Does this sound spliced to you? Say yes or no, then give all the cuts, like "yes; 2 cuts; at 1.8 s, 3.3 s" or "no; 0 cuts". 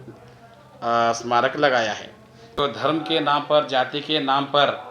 yes; 1 cut; at 2.6 s